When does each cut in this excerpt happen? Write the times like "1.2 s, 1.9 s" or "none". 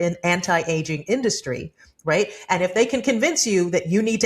none